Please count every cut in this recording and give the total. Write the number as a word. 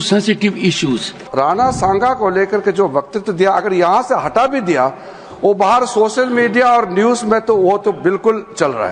one